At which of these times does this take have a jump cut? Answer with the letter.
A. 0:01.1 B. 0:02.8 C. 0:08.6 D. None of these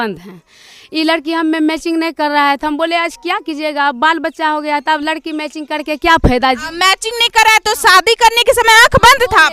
D